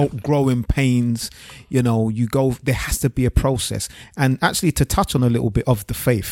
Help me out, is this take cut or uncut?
uncut